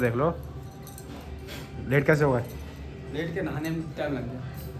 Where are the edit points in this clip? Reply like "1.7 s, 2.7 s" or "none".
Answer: none